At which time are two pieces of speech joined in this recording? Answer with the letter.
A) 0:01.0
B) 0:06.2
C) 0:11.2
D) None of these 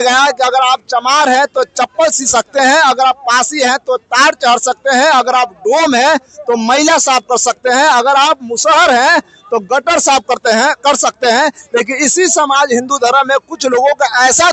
D